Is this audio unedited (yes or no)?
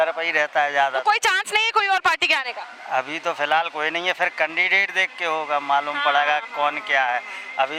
yes